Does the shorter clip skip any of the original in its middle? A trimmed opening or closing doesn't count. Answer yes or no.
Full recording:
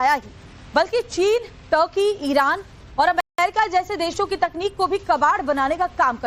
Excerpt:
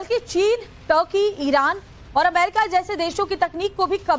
yes